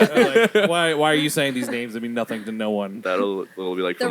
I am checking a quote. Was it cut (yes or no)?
no